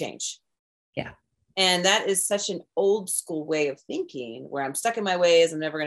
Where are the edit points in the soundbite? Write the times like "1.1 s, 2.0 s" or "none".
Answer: none